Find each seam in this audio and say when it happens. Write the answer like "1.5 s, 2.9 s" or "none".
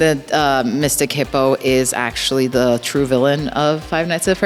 none